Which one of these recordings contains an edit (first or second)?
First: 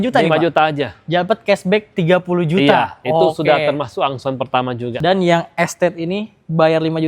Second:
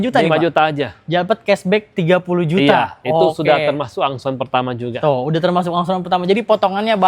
first